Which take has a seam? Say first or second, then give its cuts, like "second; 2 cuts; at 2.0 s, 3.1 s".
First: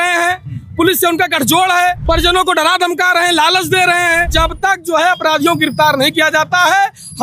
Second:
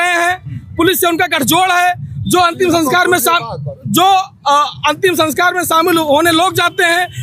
first; 2 cuts; at 2.0 s, 4.3 s